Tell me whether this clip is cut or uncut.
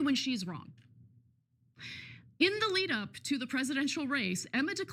uncut